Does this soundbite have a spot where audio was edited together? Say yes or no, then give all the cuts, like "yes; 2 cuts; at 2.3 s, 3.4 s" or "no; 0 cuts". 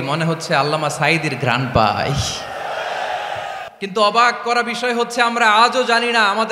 yes; 1 cut; at 3.7 s